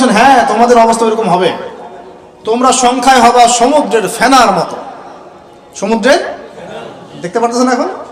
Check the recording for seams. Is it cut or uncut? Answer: uncut